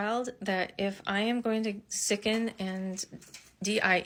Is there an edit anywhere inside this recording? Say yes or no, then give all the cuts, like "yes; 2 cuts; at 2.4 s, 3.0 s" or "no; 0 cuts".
no; 0 cuts